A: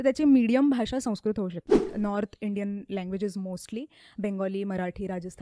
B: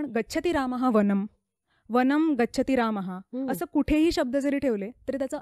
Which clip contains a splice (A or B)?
A